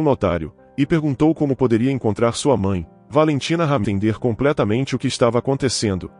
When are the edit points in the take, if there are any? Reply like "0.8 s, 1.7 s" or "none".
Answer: 3.8 s

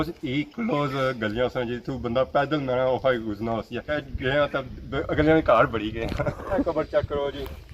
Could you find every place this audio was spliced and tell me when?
4.0 s, 6.6 s

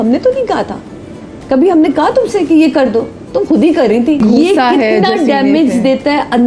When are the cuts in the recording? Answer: 4.2 s

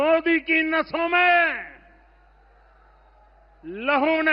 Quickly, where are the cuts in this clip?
none

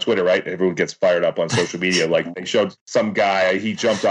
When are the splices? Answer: 2.7 s

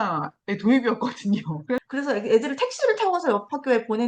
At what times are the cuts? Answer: 1.7 s

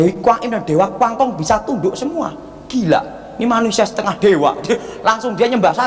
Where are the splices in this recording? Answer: none

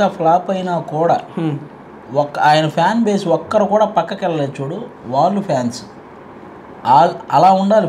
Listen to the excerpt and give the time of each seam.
none

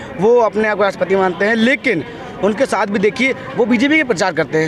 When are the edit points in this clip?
none

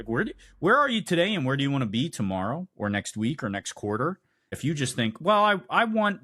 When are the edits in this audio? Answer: 4.6 s

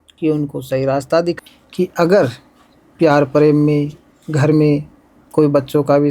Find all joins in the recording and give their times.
1.4 s

